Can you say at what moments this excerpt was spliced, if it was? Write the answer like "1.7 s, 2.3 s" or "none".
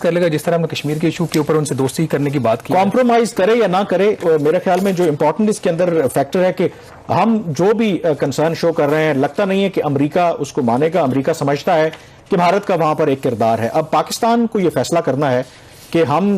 none

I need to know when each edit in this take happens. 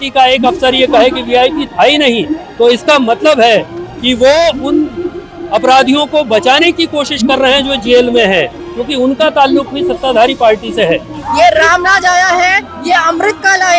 11.1 s

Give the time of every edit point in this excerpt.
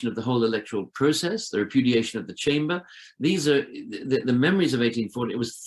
none

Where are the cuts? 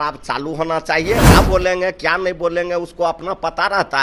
1.3 s

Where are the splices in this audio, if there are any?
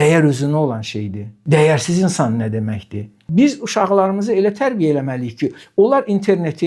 3.2 s

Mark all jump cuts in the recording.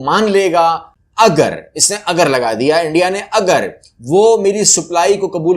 0.9 s

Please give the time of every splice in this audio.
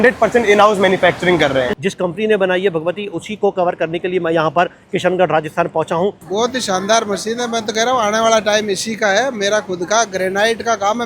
1.7 s, 6.1 s

